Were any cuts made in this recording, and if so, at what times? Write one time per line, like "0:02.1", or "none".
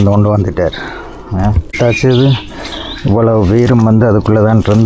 0:01.8